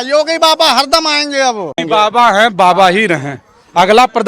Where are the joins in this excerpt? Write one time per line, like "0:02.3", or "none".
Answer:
0:01.7

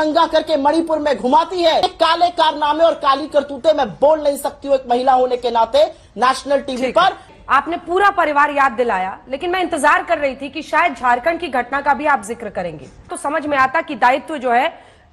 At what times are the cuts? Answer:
0:01.8
0:07.3
0:13.2

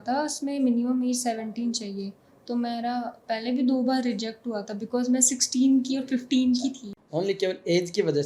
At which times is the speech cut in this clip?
none

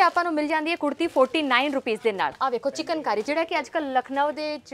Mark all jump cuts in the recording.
0:02.3

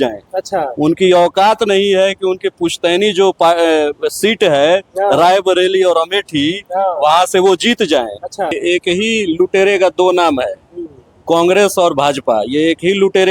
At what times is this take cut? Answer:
0:08.6

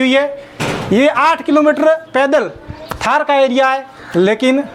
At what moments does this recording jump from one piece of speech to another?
none

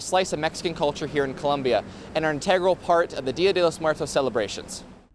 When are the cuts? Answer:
none

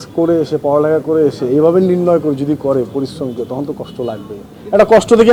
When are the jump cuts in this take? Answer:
none

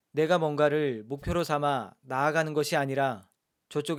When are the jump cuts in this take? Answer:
none

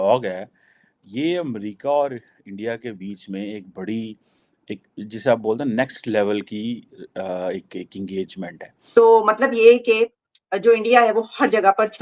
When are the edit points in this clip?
0:08.7

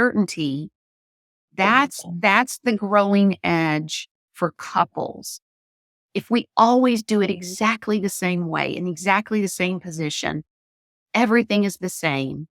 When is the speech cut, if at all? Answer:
none

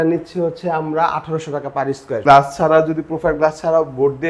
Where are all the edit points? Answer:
0:02.2

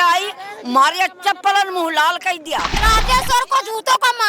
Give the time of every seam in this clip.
0:02.8

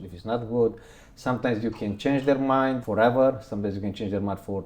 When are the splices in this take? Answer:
0:02.8

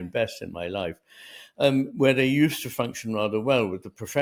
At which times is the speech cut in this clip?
none

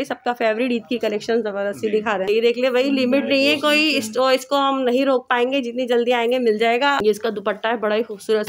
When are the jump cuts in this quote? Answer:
0:02.3
0:07.0

